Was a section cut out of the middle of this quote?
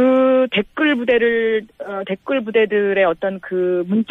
no; 0 cuts

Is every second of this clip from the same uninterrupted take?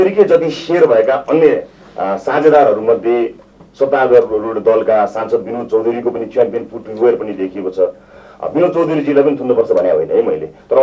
yes; 0 cuts

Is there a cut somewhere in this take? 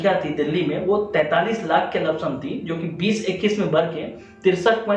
no; 0 cuts

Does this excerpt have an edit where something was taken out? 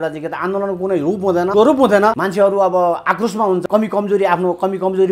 yes; 3 cuts; at 1.5 s, 2.2 s, 3.6 s

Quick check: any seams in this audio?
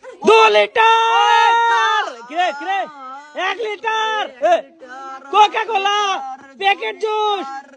no; 0 cuts

